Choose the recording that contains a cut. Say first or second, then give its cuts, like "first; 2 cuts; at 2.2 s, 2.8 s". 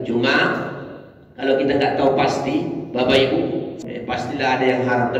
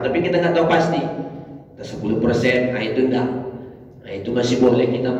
first; 1 cut; at 3.8 s